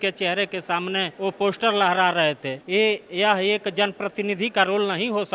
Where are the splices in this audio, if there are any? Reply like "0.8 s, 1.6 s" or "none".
1.1 s, 2.5 s